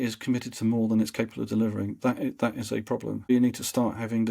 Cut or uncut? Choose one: cut